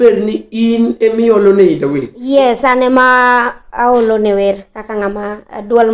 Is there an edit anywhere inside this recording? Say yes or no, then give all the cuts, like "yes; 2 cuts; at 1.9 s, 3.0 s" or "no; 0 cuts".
yes; 1 cut; at 2.1 s